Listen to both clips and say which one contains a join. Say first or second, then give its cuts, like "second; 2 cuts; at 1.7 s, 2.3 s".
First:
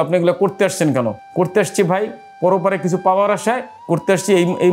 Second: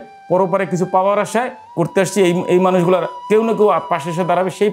first; 1 cut; at 1.2 s